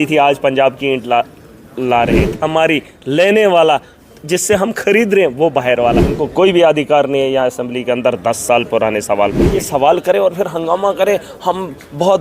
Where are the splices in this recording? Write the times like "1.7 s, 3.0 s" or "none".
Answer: 2.3 s, 6.1 s, 9.6 s